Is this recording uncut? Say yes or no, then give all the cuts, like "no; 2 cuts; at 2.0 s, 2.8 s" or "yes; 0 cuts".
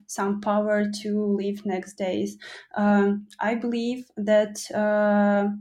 yes; 0 cuts